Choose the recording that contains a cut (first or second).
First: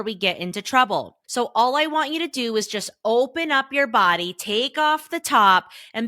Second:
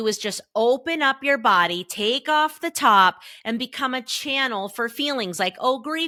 first